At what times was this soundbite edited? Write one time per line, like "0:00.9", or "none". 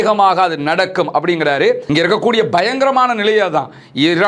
0:01.8